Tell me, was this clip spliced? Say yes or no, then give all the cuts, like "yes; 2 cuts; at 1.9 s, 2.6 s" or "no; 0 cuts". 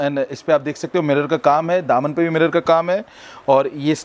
no; 0 cuts